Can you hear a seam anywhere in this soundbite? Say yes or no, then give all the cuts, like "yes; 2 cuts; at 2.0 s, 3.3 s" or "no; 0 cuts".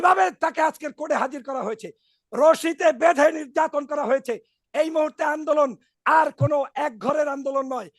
yes; 1 cut; at 4.6 s